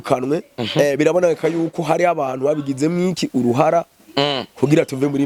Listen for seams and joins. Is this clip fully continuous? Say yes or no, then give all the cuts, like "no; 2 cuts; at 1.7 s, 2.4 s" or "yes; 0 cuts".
yes; 0 cuts